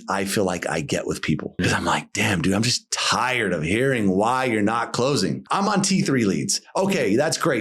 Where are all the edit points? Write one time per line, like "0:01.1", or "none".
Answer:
0:01.6
0:05.4